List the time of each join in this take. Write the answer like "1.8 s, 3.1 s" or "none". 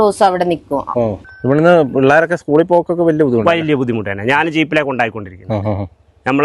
1.3 s